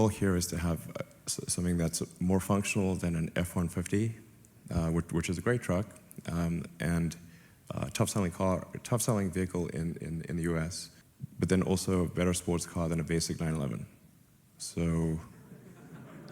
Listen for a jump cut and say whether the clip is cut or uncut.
uncut